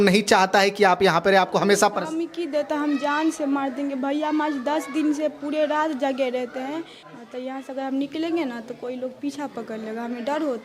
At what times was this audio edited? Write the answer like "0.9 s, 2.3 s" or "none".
7.0 s